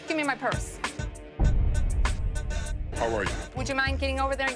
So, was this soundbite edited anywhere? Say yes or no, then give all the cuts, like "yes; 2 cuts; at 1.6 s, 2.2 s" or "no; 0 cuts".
yes; 1 cut; at 1.2 s